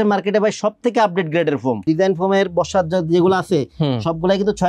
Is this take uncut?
no; 1 cut; at 1.8 s

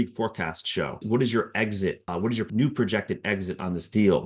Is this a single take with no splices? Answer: no; 2 cuts; at 1.0 s, 2.5 s

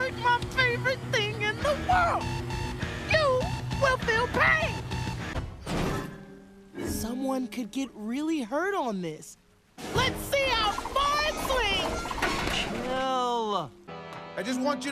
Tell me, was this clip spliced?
no; 0 cuts

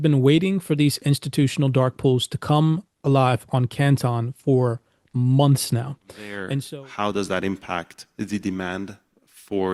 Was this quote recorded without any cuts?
no; 1 cut; at 6.4 s

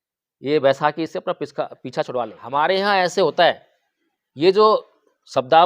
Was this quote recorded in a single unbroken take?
no; 1 cut; at 2.4 s

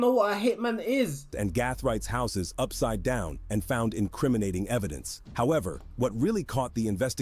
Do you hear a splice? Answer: yes; 1 cut; at 1.3 s

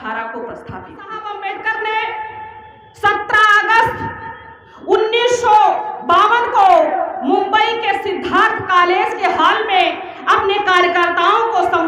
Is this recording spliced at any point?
yes; 1 cut; at 1.3 s

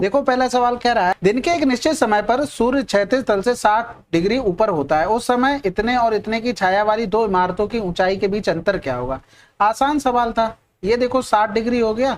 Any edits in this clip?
yes; 1 cut; at 1.2 s

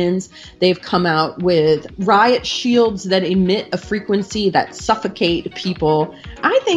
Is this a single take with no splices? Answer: yes; 0 cuts

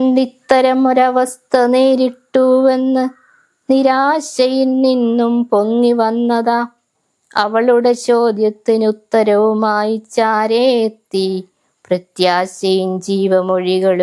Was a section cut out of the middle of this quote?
no; 0 cuts

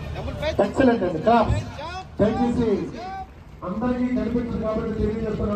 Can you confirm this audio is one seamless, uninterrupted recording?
yes; 0 cuts

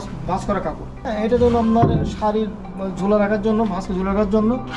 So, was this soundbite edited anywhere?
yes; 1 cut; at 1.0 s

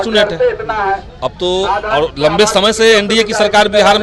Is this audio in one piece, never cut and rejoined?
yes; 0 cuts

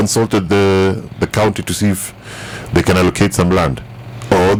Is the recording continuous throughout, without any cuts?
yes; 0 cuts

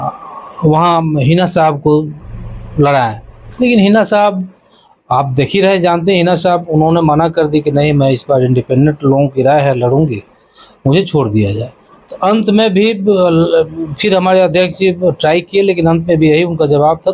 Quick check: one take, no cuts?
yes; 0 cuts

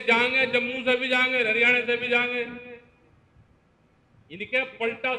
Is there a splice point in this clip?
no; 0 cuts

